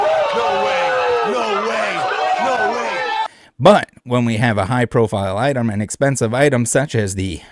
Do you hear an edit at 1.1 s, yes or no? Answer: no